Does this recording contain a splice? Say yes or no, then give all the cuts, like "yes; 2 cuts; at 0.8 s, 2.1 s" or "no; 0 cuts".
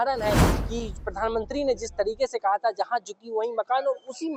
no; 0 cuts